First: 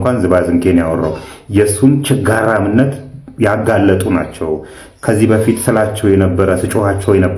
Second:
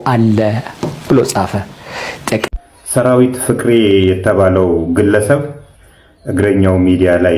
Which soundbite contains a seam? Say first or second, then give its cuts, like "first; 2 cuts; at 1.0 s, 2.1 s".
second; 1 cut; at 2.4 s